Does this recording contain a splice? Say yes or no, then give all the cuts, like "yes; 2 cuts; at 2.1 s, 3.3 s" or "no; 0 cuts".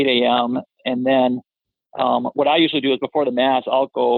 no; 0 cuts